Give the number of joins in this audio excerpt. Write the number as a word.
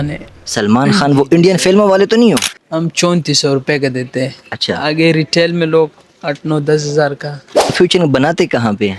two